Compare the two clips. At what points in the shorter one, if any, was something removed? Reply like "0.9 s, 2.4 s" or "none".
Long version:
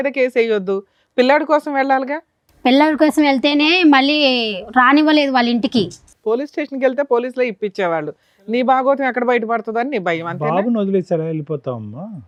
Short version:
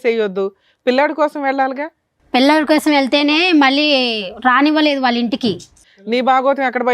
5.8 s

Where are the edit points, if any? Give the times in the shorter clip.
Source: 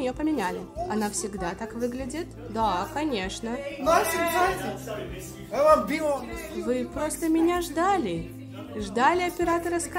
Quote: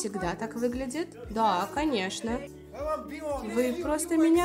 2.4 s, 3.4 s

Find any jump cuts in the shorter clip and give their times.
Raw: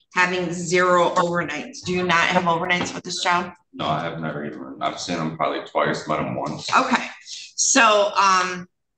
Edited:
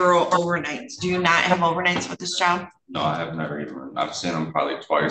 none

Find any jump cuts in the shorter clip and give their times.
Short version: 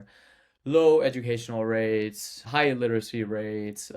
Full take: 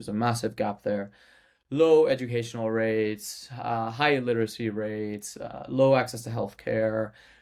2.5 s

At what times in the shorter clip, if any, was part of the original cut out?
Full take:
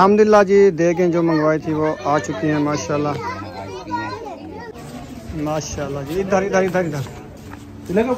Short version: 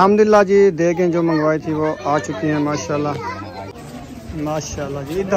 3.7 s

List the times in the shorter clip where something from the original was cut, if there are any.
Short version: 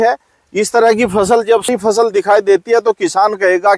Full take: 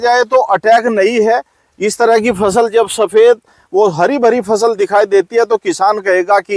1.7 s

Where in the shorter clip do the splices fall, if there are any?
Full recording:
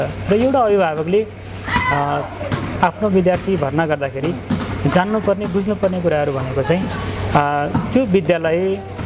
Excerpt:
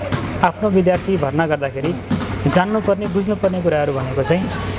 none

